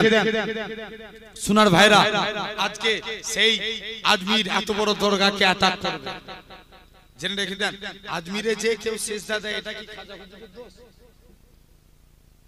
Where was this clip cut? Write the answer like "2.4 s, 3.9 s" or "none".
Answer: none